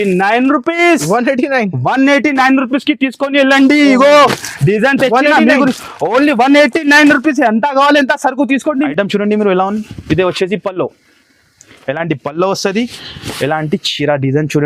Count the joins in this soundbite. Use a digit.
1